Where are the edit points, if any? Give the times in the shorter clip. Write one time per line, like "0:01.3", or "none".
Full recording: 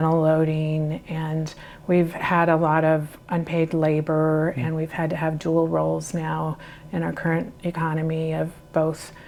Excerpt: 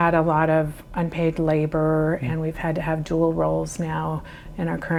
none